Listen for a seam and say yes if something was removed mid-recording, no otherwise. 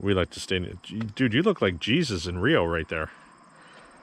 no